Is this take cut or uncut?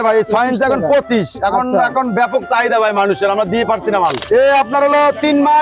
cut